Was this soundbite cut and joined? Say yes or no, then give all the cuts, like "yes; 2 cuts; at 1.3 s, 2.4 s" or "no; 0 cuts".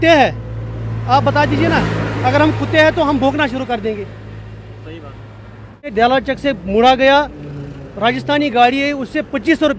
yes; 1 cut; at 5.9 s